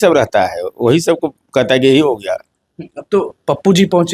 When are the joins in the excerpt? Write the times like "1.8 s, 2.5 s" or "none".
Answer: none